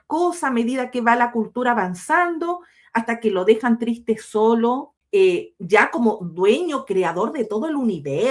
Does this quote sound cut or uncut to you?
cut